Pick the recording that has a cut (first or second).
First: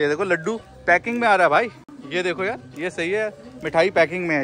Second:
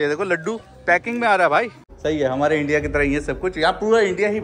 second